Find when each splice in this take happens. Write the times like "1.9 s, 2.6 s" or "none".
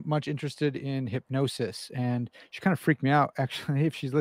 none